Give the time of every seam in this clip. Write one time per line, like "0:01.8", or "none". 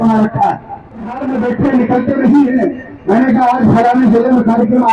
0:01.2